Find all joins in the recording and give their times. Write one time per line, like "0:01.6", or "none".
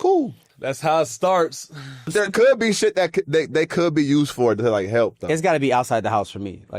0:02.2